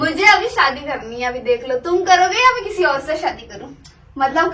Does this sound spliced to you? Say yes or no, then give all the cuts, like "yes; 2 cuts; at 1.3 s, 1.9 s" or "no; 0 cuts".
yes; 1 cut; at 3.4 s